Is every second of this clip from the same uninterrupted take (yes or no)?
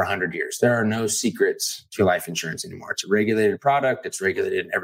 yes